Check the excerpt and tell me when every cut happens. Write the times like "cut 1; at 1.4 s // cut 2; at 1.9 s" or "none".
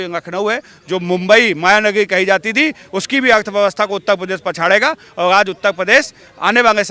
none